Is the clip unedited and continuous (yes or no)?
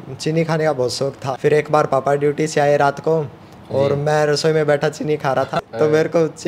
no